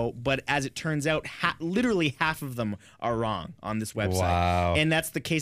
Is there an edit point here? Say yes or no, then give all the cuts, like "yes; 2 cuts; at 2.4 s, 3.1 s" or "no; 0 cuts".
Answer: no; 0 cuts